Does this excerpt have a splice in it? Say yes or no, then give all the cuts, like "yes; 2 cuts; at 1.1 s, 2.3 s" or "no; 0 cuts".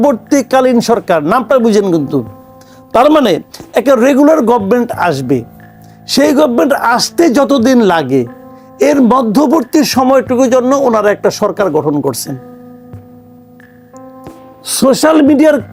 no; 0 cuts